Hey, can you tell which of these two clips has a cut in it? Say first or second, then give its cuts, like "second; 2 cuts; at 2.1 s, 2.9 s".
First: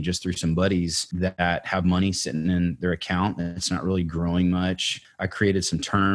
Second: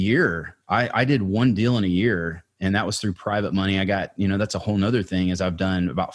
first; 2 cuts; at 1.1 s, 5.0 s